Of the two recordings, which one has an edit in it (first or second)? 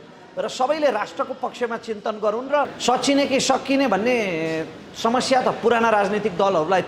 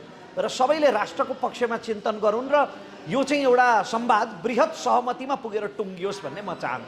first